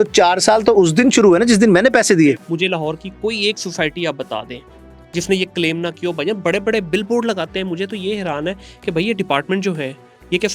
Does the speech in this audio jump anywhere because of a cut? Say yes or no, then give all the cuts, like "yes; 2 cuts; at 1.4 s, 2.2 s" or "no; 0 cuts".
yes; 1 cut; at 2.5 s